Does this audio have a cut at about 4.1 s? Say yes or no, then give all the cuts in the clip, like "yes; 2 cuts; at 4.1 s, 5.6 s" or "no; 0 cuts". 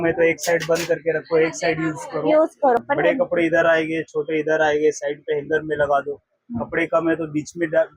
no; 1 cut; at 2.8 s